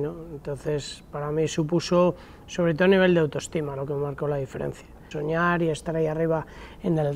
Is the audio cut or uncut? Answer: cut